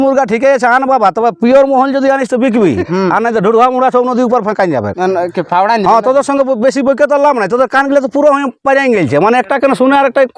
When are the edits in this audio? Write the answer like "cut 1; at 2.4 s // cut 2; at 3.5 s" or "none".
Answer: none